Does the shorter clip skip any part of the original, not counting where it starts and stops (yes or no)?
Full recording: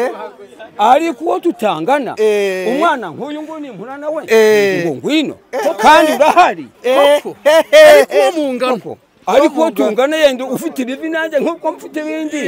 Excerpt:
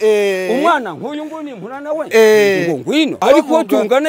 yes